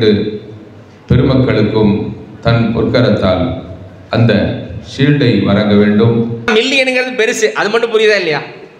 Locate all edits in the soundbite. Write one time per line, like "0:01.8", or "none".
0:06.4